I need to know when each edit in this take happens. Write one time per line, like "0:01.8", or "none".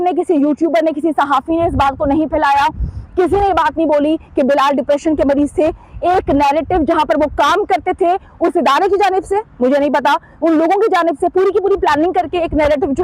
none